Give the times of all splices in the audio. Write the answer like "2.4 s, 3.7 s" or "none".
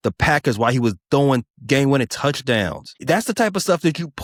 none

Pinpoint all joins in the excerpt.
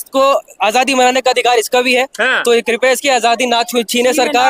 none

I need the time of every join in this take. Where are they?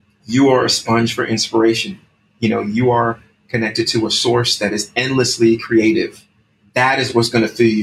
6.6 s

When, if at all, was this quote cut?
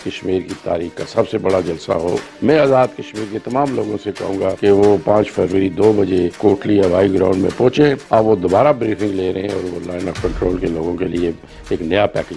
2.3 s, 4.6 s, 6.3 s, 8.0 s

